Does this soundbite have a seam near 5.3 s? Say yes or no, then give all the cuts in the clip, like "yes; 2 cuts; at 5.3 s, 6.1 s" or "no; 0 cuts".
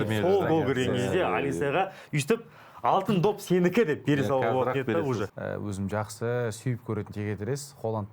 yes; 1 cut; at 5.3 s